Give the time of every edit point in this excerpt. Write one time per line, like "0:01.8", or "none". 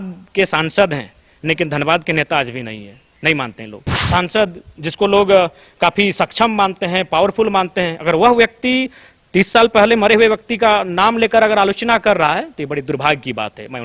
0:03.9